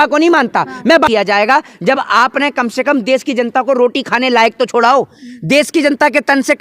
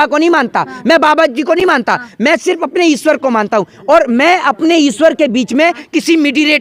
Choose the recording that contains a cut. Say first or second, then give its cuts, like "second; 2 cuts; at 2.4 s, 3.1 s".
first; 1 cut; at 1.1 s